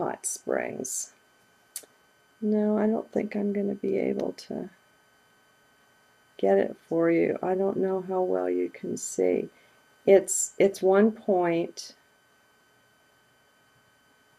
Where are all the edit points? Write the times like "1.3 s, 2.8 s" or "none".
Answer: 10.8 s